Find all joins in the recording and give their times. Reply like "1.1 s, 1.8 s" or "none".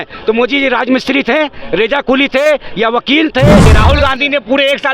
3.7 s